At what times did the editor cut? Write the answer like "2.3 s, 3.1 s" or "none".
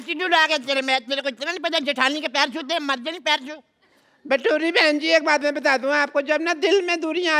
none